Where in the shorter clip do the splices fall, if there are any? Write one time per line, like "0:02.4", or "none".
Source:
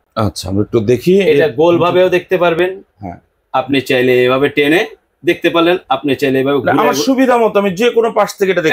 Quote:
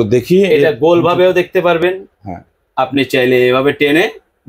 none